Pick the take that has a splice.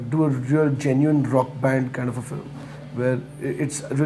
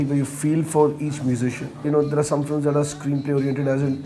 second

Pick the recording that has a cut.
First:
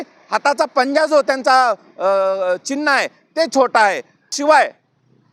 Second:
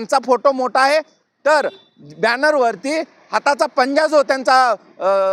first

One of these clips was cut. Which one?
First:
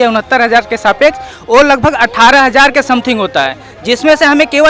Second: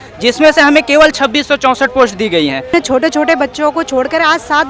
second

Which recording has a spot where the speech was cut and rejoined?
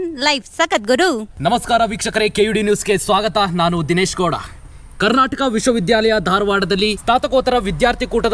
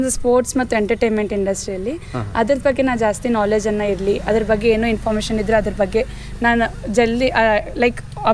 first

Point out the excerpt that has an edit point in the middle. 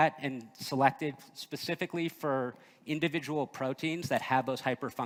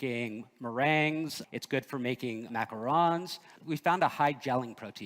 second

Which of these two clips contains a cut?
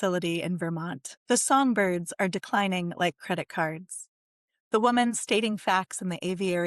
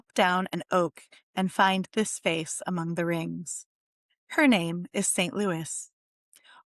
first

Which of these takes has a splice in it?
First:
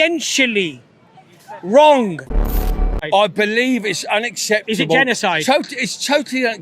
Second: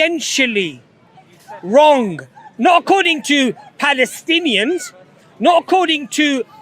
first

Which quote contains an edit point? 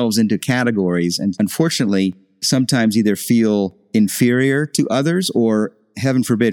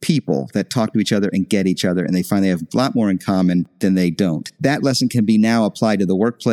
first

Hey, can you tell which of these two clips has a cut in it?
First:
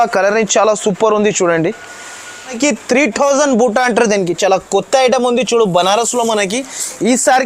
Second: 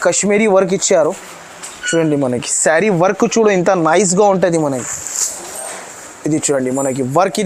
first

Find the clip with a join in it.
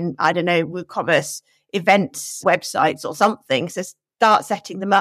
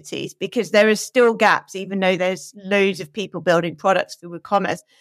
first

